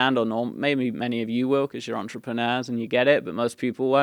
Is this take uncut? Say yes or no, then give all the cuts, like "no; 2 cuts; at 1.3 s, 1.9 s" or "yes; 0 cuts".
yes; 0 cuts